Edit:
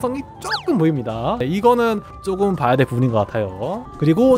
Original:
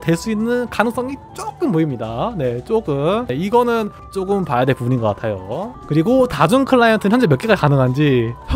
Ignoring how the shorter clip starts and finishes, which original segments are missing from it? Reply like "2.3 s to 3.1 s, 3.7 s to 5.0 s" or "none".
2.3 s to 3.3 s